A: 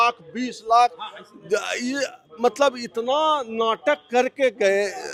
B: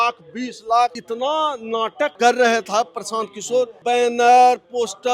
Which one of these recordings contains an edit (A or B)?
B